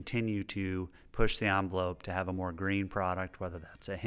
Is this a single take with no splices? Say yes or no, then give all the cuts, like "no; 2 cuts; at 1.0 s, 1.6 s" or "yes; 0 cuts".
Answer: yes; 0 cuts